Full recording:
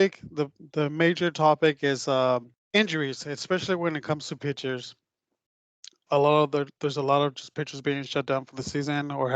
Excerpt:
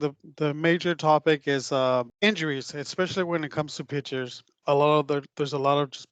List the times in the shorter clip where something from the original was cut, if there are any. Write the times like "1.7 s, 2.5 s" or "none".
2.1 s, 4.4 s

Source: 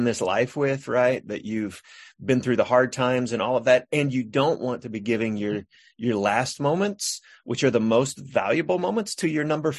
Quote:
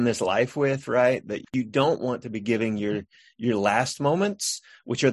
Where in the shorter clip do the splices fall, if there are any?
1.5 s

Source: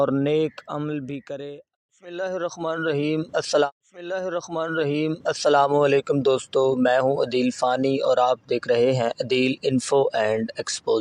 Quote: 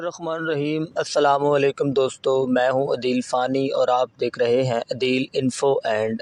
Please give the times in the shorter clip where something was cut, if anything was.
1.2 s

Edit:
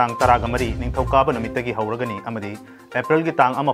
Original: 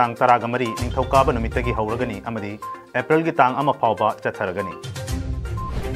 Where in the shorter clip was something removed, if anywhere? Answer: none

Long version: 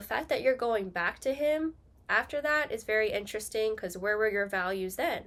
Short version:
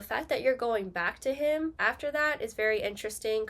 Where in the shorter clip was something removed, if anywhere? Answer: 1.8 s

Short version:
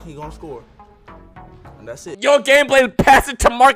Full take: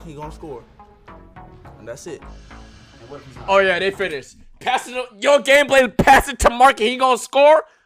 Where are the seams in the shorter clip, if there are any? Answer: 2.1 s

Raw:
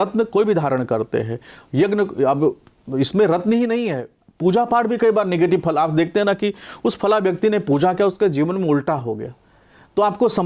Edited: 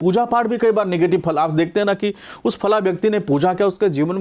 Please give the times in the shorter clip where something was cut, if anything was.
none

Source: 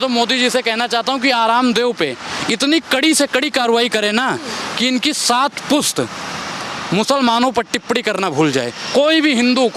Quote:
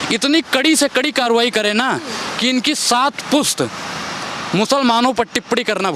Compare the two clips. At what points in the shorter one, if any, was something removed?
none

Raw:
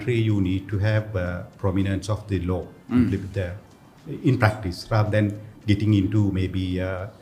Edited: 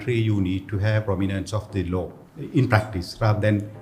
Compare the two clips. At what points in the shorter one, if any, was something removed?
1.0 s, 2.2 s

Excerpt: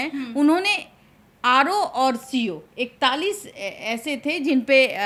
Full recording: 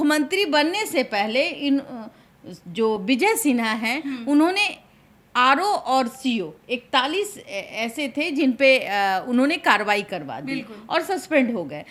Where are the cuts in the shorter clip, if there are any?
none

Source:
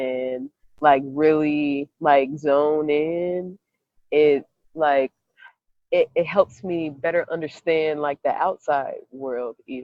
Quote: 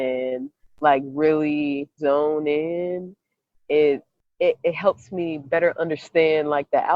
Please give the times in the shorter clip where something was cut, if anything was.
1.9 s, 4.2 s

